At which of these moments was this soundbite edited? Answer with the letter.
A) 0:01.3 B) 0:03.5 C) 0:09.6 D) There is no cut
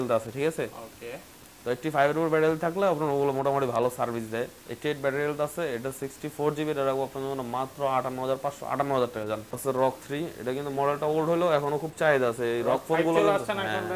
C